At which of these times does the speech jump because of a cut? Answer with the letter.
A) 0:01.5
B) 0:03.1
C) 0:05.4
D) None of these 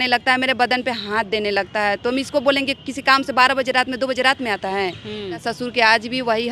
C